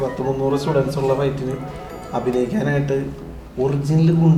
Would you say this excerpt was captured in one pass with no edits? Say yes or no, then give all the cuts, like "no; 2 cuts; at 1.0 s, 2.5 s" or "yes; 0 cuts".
yes; 0 cuts